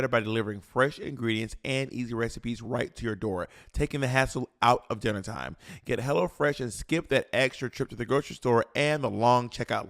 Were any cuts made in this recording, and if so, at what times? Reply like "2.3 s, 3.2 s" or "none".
3.6 s, 5.7 s